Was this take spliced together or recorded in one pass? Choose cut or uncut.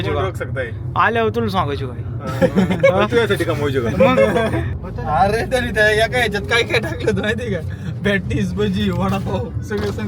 cut